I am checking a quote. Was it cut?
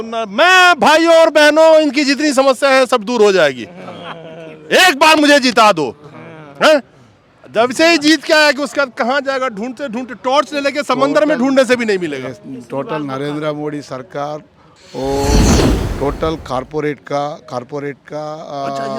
no; 0 cuts

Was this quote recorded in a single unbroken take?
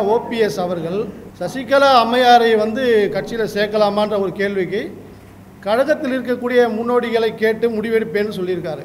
no; 1 cut; at 1.2 s

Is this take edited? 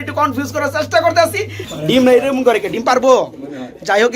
yes; 1 cut; at 1.6 s

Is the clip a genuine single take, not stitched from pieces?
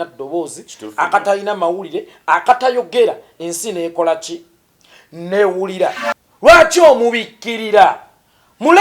no; 1 cut; at 6.1 s

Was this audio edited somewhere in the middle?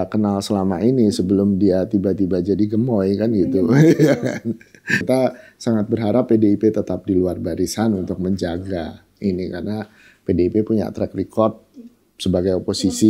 yes; 1 cut; at 5.0 s

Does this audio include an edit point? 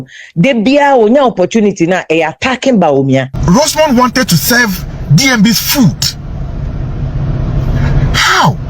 yes; 1 cut; at 3.3 s

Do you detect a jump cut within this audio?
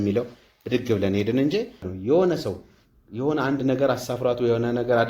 yes; 1 cut; at 1.9 s

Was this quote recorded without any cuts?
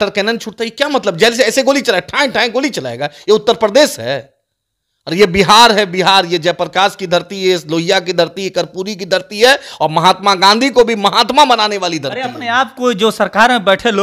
yes; 0 cuts

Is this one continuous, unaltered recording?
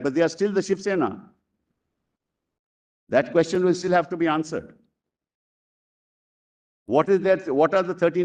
yes; 0 cuts

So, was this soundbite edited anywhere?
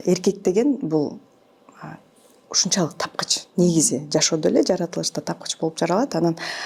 no; 0 cuts

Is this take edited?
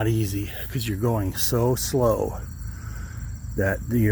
no; 0 cuts

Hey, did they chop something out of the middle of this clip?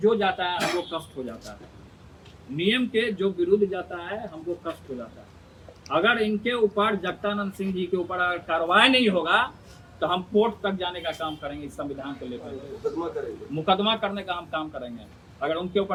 no; 0 cuts

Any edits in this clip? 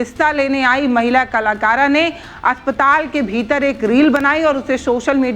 no; 0 cuts

